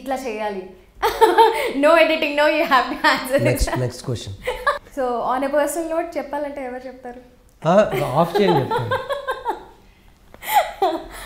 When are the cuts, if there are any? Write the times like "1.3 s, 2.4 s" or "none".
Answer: 4.8 s